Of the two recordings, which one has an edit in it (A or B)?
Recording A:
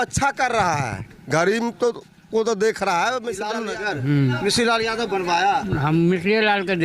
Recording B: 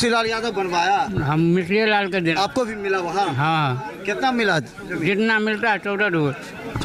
A